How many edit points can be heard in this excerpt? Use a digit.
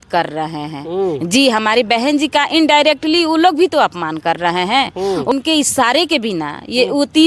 1